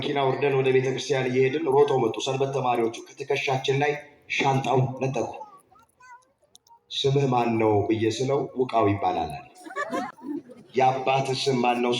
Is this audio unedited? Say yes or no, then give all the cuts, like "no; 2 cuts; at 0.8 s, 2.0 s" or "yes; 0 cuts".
no; 1 cut; at 10.1 s